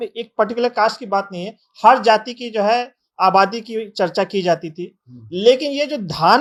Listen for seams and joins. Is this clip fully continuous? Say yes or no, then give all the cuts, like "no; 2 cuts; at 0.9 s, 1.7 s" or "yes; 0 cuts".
yes; 0 cuts